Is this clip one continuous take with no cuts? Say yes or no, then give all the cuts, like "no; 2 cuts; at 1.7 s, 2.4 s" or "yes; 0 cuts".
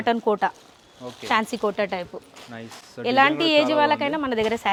yes; 0 cuts